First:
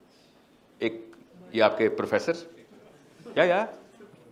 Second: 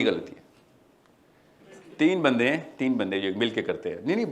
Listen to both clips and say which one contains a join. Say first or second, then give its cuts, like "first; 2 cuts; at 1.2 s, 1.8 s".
second; 1 cut; at 1.6 s